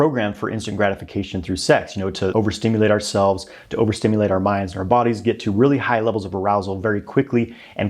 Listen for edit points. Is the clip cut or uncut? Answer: cut